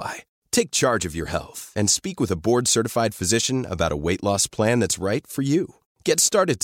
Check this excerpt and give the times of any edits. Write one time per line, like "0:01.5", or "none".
none